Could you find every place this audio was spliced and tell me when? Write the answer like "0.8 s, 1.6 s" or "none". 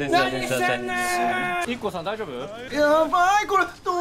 1.6 s, 2.6 s